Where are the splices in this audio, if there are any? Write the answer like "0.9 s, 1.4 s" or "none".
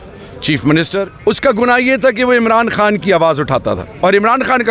1.1 s